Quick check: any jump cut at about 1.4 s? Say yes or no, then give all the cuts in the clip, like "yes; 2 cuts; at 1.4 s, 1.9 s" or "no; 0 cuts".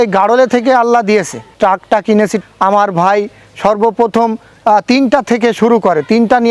yes; 2 cuts; at 1.4 s, 2.4 s